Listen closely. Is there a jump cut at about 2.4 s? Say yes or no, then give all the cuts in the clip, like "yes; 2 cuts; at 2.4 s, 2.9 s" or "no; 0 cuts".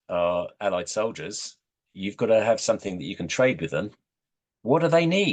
no; 0 cuts